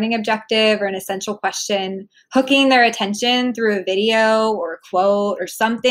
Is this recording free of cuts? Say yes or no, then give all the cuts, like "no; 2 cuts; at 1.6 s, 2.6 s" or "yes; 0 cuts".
yes; 0 cuts